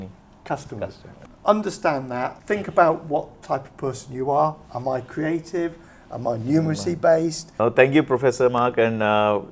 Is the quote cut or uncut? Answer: cut